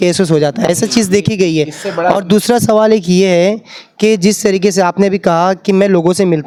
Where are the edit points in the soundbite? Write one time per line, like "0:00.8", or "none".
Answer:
none